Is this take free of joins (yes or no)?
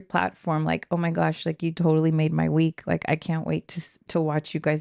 yes